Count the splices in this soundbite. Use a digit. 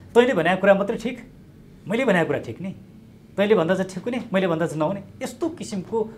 0